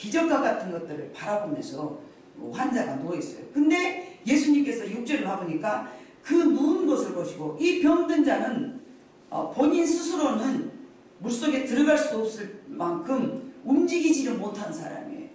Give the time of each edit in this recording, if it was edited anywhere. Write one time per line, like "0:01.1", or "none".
none